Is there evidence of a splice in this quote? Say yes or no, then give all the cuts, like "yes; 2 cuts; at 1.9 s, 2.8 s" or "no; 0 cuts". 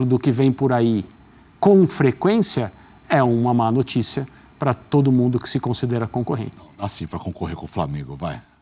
yes; 1 cut; at 6.6 s